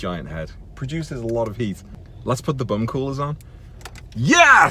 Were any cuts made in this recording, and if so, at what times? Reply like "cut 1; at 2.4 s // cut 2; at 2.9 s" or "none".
cut 1; at 1.8 s